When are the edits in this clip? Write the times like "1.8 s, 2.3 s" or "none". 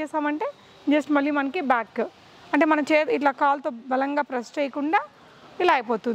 none